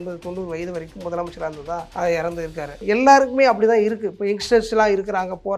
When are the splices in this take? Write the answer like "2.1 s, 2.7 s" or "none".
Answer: 1.9 s, 2.8 s